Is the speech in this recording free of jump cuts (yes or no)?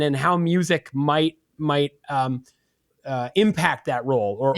yes